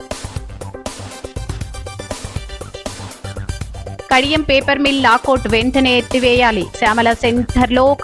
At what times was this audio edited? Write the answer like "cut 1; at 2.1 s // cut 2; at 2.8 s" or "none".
cut 1; at 2.3 s // cut 2; at 3.4 s